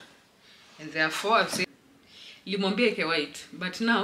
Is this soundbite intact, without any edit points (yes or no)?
no